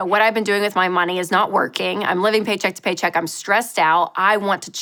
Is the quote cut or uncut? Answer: uncut